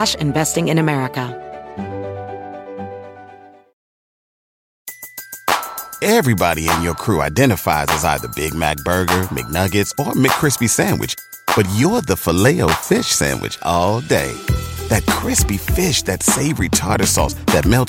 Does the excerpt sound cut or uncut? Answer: cut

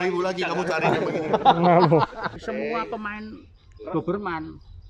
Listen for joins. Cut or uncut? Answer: cut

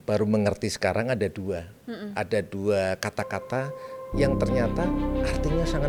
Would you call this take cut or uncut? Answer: uncut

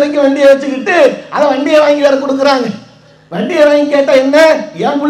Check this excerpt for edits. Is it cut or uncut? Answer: uncut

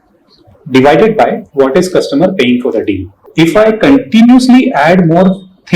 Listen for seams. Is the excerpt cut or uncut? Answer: cut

